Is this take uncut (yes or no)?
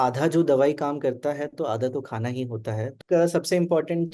no